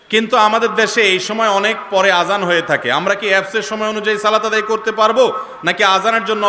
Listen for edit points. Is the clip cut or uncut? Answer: uncut